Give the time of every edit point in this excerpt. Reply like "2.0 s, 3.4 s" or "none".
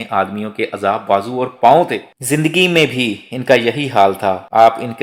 2.1 s